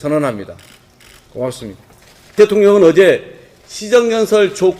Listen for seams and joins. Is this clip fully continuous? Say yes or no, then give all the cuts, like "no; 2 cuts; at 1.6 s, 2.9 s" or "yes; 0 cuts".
no; 1 cut; at 2.4 s